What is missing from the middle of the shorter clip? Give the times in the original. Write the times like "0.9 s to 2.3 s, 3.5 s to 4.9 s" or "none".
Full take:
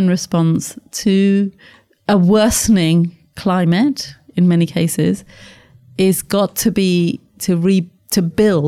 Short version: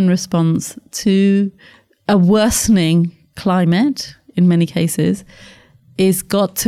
none

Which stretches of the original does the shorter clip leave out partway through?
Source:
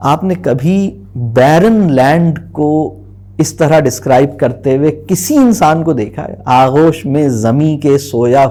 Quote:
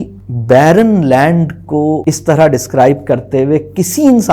2.9 s to 3.3 s

